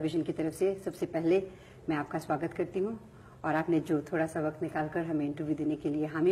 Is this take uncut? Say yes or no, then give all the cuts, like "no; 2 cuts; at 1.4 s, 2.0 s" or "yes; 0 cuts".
yes; 0 cuts